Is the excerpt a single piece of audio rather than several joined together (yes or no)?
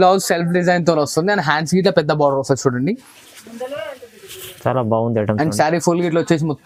yes